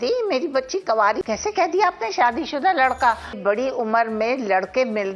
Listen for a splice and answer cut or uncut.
cut